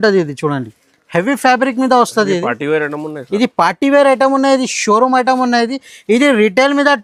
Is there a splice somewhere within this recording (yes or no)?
no